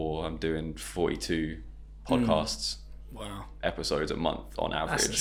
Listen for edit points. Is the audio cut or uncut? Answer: uncut